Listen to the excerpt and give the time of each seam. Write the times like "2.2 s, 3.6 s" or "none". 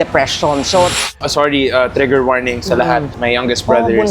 1.1 s, 3.1 s